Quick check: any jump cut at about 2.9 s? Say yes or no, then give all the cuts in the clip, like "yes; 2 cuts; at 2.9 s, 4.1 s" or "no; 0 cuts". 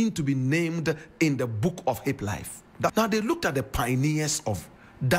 yes; 1 cut; at 2.9 s